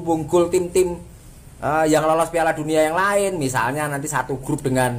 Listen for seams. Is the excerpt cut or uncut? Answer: uncut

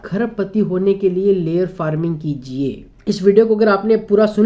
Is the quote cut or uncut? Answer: cut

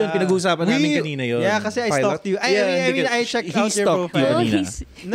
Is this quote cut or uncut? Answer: uncut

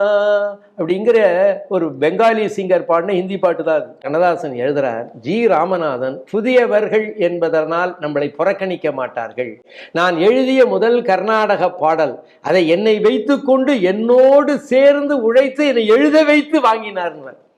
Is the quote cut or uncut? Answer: cut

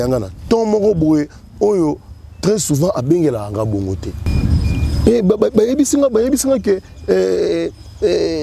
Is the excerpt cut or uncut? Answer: cut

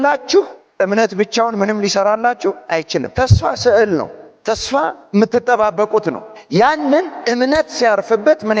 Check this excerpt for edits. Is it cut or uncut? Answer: uncut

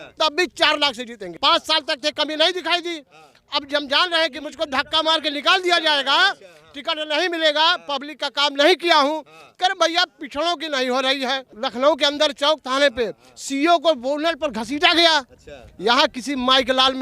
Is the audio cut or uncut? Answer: cut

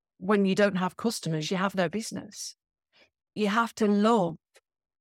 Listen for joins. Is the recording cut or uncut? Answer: cut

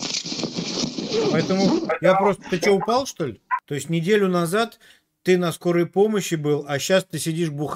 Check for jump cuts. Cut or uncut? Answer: cut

